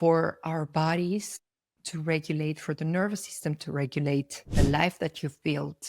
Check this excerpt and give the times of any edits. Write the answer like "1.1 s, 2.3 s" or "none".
4.4 s